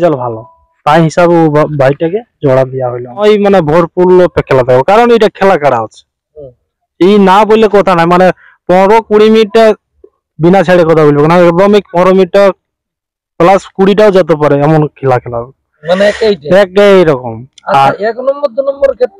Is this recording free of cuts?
no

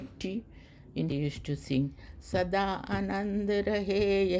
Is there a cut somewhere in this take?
yes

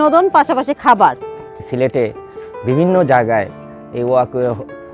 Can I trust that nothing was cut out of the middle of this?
no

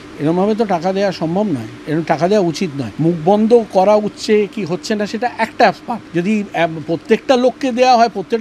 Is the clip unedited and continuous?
no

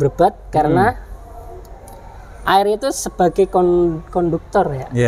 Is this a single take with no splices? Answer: yes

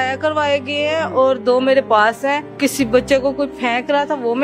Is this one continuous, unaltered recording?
no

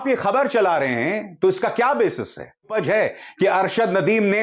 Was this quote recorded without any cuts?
no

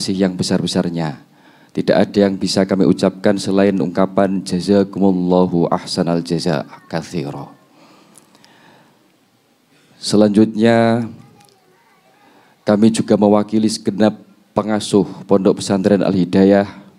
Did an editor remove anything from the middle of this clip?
no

